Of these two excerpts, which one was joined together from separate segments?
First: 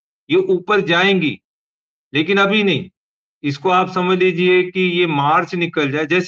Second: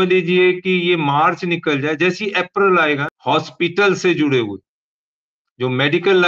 second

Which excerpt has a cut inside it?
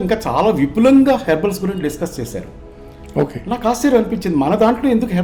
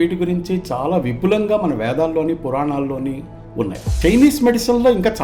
second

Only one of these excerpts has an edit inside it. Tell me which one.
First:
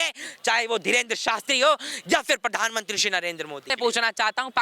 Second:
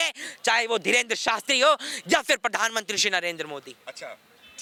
first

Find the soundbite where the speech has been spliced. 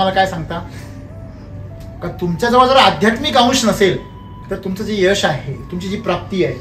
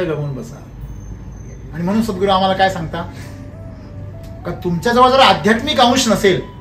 second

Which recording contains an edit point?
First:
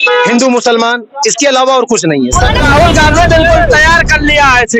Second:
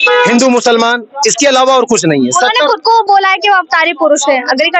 first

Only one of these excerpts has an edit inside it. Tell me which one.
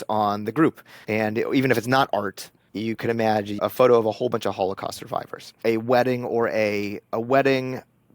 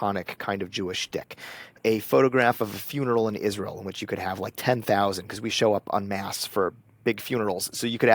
first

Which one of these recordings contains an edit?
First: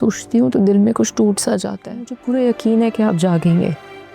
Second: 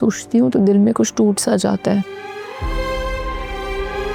first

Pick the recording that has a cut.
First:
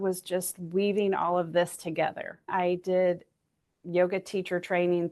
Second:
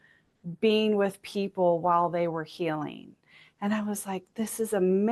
first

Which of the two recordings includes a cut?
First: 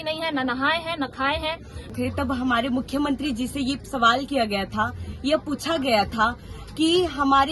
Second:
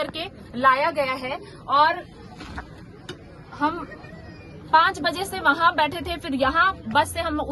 first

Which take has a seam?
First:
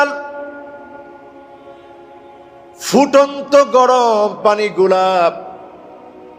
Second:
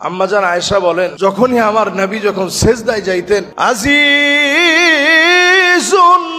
second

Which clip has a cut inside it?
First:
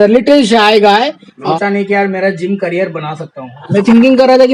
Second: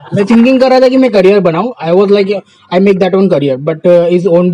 first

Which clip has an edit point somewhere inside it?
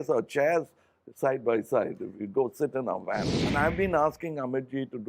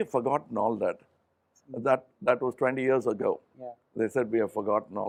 first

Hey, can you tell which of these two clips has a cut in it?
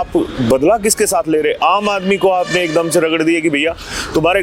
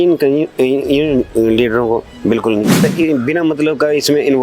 second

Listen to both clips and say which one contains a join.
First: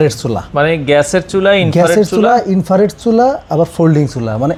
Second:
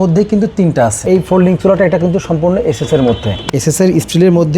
second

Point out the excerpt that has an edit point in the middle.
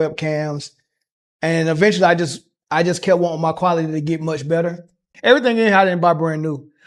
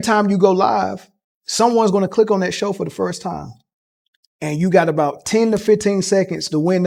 first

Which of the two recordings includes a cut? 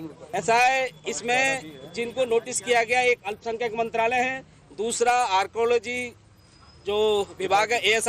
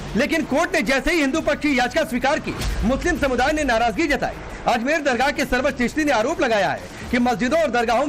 second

